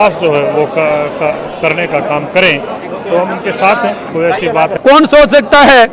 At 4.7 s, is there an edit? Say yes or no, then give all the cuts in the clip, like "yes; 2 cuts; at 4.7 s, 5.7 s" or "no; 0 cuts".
yes; 1 cut; at 4.7 s